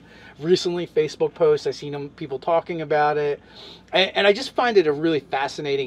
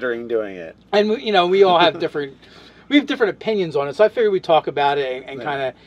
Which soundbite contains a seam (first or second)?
second